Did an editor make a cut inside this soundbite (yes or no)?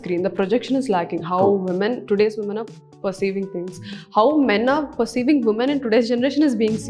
no